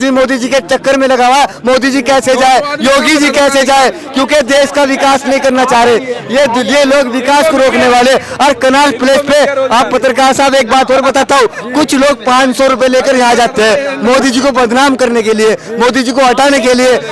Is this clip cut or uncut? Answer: uncut